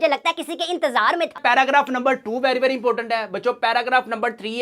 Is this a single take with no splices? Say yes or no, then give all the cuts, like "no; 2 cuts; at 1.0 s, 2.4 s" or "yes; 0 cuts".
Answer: no; 1 cut; at 1.4 s